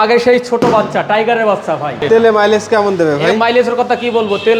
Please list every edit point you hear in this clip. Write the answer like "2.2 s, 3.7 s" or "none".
2.0 s